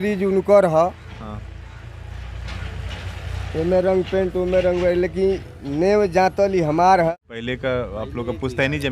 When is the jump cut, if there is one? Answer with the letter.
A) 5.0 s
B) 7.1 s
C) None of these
B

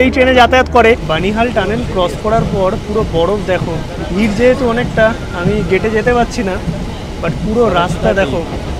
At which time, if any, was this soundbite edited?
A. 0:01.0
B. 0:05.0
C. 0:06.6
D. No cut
A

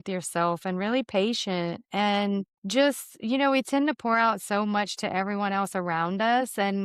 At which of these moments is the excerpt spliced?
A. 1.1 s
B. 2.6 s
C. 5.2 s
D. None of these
B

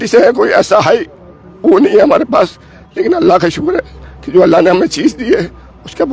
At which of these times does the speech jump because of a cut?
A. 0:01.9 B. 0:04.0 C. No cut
C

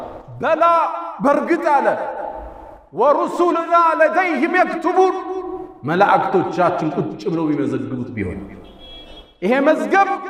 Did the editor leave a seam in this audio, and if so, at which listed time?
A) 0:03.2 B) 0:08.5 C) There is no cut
C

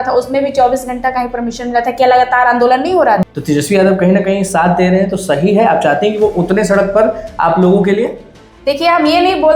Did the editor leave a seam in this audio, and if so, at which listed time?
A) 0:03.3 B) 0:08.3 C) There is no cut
A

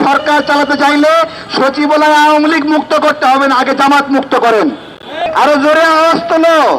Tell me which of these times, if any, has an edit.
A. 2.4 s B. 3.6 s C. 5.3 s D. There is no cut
C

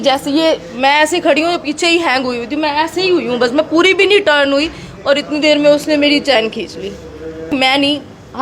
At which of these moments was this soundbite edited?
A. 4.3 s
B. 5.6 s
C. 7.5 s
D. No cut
C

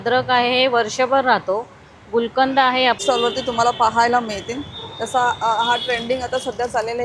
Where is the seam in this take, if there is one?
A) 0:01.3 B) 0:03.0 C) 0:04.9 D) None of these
B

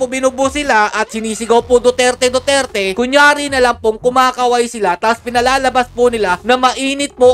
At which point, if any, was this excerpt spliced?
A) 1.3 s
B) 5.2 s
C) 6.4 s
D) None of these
D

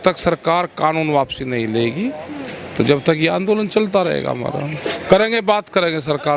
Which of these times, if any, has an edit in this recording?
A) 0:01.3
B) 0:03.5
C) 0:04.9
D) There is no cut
C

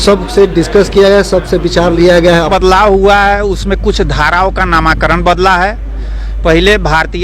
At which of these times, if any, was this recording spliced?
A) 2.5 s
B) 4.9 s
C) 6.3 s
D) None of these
A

